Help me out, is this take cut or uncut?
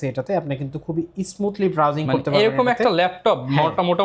uncut